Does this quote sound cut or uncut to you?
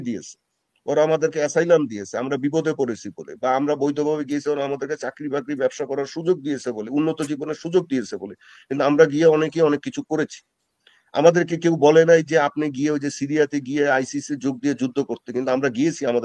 uncut